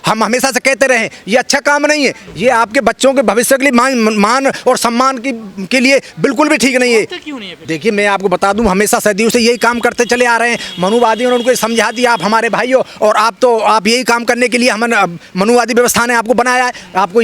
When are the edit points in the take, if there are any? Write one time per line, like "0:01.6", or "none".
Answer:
none